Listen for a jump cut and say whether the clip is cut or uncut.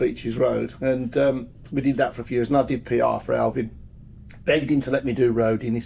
uncut